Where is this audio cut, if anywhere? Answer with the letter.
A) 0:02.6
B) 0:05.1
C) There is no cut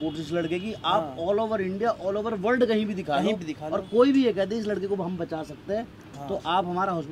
C